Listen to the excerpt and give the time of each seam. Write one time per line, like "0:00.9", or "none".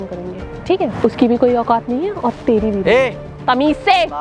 0:00.9